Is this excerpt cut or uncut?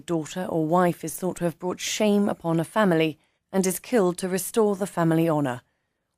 cut